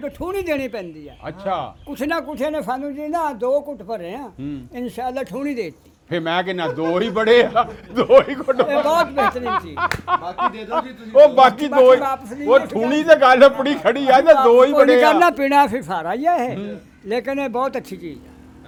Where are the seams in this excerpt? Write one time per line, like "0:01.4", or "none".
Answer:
none

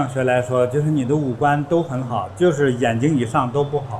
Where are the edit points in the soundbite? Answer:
none

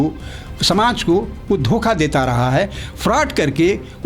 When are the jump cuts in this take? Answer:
none

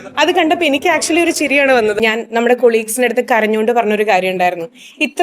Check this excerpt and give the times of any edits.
0:02.0

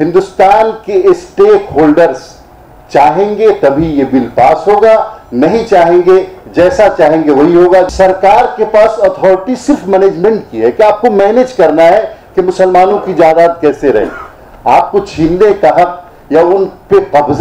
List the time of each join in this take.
0:07.9

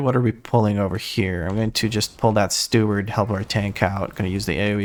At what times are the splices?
none

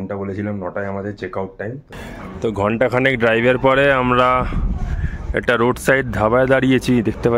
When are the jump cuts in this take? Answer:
0:01.9

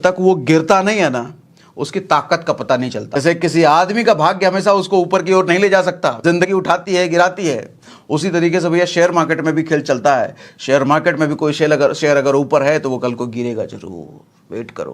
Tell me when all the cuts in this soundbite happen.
0:03.2
0:06.5

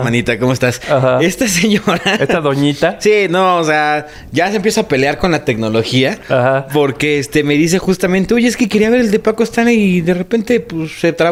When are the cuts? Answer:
none

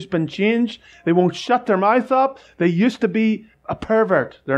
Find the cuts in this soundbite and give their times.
0:03.5

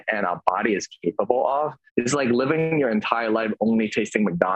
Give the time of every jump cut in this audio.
0:01.8

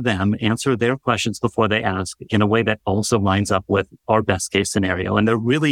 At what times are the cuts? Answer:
0:03.9

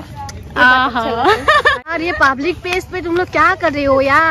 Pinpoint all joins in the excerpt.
0:01.8

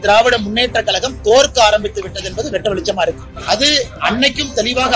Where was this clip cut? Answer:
0:03.3

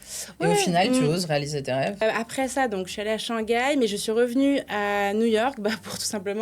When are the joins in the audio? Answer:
0:02.0

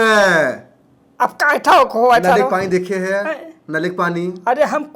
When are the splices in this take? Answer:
none

